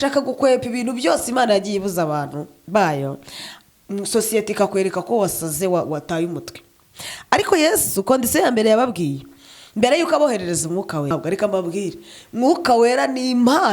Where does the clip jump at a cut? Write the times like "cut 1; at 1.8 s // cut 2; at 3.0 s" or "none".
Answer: cut 1; at 11.1 s